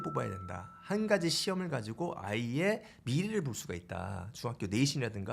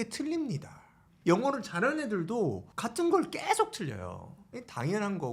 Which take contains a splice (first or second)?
second